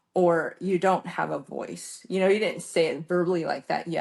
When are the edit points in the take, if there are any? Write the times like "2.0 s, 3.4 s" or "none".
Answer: none